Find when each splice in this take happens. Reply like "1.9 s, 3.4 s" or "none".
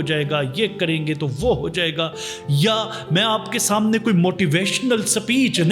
none